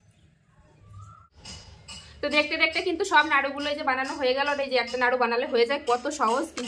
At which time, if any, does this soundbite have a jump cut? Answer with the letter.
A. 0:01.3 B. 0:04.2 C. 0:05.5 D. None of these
A